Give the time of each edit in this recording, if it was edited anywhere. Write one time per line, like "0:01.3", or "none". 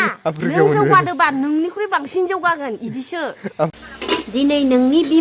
0:03.7

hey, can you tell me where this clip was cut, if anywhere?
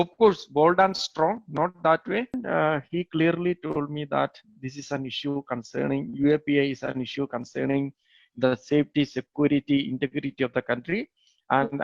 0:02.4

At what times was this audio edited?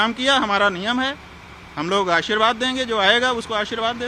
none

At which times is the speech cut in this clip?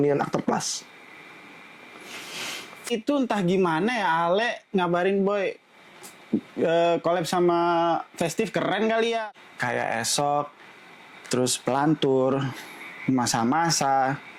0:02.9
0:09.2

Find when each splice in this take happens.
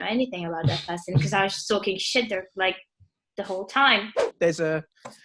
0:04.2

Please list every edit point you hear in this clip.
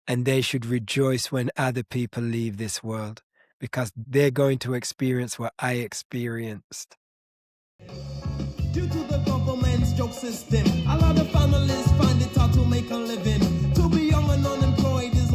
0:04.0
0:07.3

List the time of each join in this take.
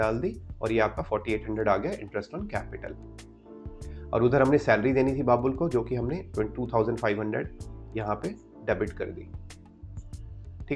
none

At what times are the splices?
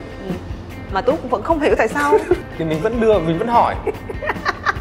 0:02.5

